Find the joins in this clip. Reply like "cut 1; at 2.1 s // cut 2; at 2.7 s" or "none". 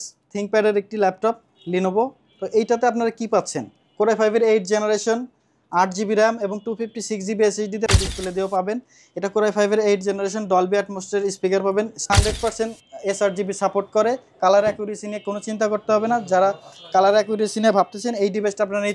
cut 1; at 7.9 s // cut 2; at 12.1 s